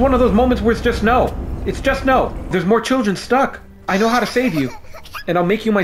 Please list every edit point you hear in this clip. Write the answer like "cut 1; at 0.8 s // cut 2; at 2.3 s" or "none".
cut 1; at 2.5 s // cut 2; at 3.7 s